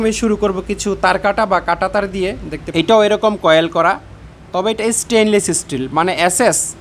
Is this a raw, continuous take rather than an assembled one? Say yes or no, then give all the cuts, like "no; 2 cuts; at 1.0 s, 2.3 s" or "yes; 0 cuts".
no; 1 cut; at 2.5 s